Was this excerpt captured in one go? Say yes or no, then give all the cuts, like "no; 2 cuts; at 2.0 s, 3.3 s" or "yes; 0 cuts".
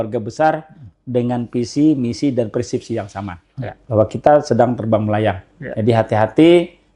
yes; 0 cuts